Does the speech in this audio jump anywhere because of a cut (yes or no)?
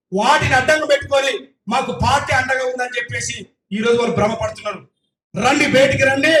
no